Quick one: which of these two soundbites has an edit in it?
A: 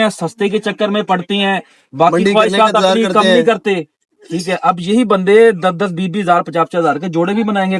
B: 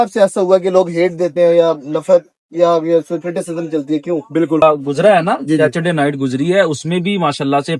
B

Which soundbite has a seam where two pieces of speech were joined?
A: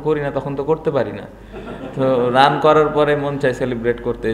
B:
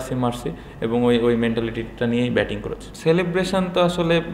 B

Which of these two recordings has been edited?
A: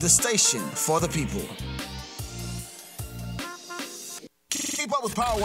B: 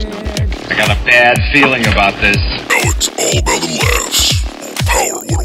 A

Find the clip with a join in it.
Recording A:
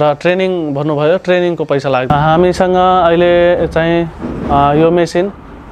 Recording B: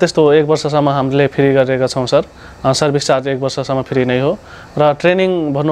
A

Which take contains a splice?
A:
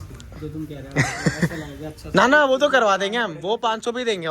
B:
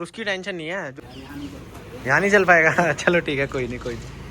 B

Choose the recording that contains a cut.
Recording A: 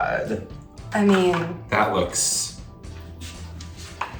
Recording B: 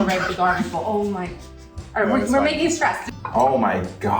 B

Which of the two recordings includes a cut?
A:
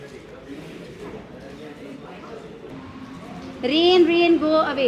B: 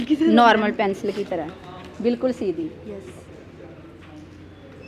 A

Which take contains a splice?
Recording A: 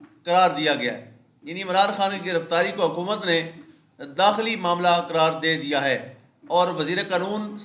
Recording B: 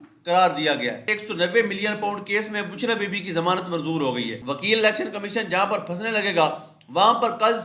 B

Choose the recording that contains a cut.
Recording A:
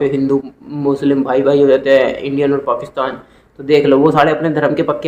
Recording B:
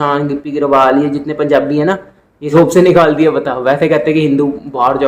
B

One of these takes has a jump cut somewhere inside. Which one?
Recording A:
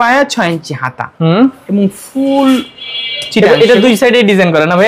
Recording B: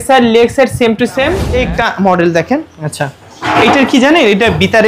B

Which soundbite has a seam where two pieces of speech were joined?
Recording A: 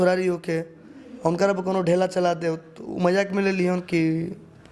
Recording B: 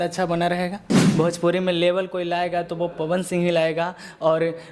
B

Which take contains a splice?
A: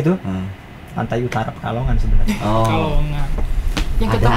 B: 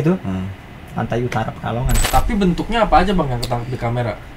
B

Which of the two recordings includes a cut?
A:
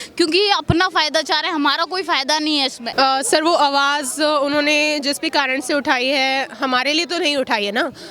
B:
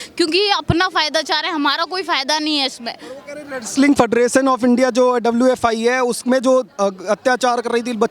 A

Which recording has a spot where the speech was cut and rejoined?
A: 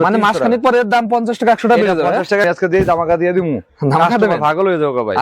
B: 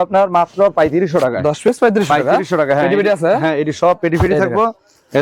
A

